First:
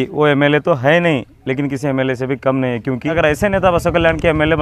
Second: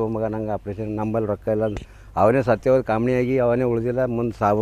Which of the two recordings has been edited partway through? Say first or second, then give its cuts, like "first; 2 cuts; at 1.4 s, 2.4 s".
first; 1 cut; at 3.1 s